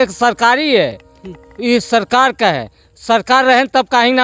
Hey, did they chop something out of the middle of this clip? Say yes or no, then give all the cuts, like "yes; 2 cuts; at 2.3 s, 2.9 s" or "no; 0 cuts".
no; 0 cuts